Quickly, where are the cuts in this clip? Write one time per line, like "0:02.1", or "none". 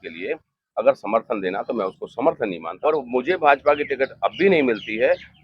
0:02.7